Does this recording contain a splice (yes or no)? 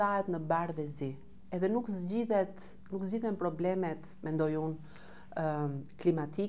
no